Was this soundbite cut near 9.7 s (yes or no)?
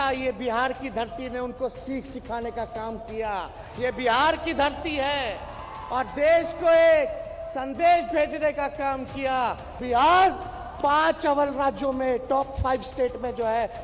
yes